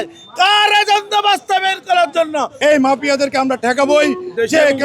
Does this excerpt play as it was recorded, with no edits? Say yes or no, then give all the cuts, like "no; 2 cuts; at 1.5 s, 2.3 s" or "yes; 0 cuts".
no; 1 cut; at 2.5 s